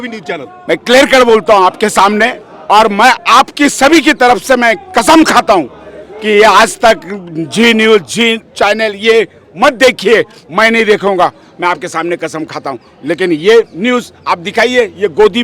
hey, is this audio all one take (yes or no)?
yes